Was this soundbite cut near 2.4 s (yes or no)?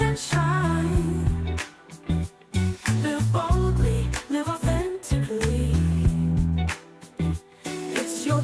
yes